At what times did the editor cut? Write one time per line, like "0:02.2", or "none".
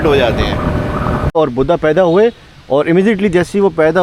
0:01.3